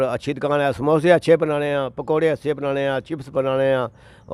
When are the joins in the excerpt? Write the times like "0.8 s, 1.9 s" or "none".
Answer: none